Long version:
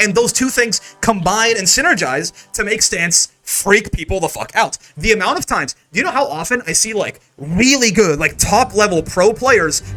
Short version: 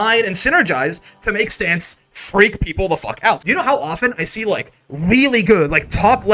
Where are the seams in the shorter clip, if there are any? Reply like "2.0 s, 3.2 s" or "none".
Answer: 3.4 s